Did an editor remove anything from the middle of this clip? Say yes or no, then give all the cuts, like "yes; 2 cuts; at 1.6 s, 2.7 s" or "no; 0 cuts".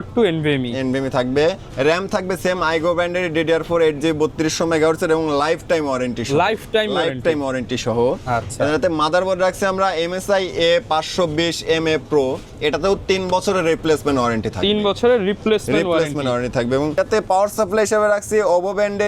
no; 0 cuts